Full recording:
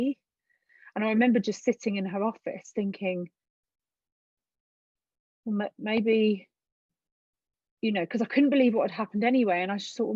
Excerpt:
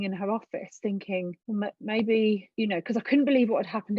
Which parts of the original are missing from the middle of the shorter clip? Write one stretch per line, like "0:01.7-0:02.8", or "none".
0:03.3-0:05.4
0:06.5-0:07.7